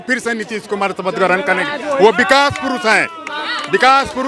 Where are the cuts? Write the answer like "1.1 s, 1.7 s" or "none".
none